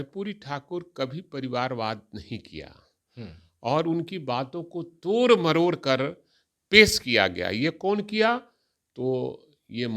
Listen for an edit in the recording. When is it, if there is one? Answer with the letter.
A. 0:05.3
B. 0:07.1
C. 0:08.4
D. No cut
D